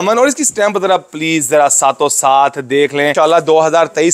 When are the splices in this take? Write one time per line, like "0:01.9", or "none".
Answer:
0:03.1